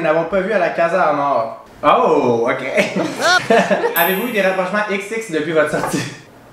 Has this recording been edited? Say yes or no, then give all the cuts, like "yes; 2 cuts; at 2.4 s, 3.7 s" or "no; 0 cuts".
yes; 2 cuts; at 1.6 s, 3.9 s